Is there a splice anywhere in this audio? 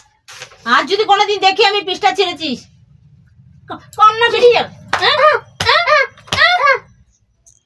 yes; 1 cut; at 6.5 s

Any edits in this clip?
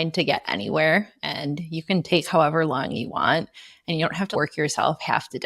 yes; 1 cut; at 4.3 s

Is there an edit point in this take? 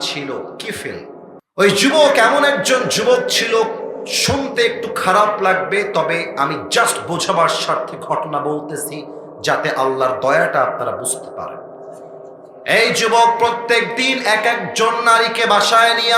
yes; 1 cut; at 1.4 s

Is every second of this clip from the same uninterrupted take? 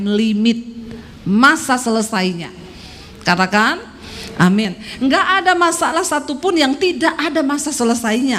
yes; 0 cuts

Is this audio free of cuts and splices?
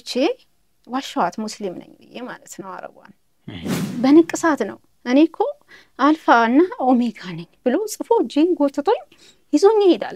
no; 1 cut; at 3.9 s

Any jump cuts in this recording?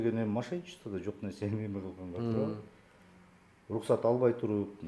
no; 0 cuts

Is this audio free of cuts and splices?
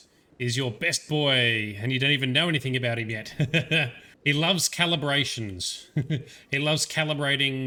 yes; 0 cuts

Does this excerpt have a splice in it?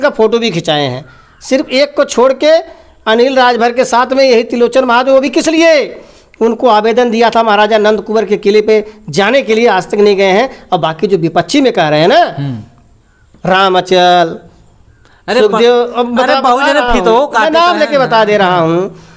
no; 0 cuts

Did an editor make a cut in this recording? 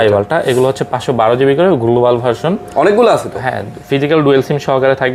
no; 0 cuts

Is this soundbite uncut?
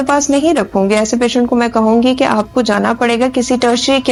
yes; 0 cuts

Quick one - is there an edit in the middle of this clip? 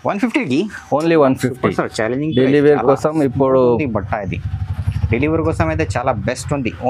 no; 0 cuts

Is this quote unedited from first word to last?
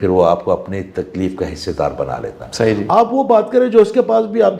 yes; 0 cuts

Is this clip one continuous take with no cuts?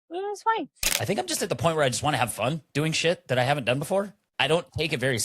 no; 1 cut; at 0.9 s

